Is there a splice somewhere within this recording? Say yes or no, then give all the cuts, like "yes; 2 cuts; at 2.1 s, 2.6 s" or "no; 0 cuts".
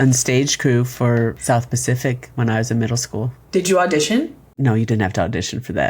yes; 1 cut; at 1.4 s